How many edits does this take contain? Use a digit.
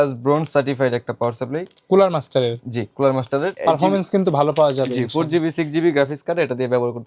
1